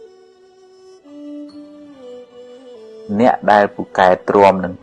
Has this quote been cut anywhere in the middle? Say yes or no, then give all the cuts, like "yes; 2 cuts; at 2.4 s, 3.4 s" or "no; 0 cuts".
yes; 2 cuts; at 1.3 s, 3.1 s